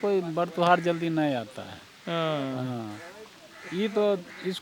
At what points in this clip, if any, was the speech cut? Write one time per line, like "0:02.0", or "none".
none